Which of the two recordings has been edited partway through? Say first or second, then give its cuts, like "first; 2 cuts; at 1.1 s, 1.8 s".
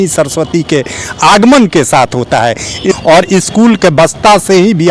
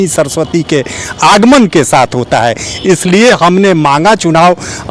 first; 1 cut; at 2.9 s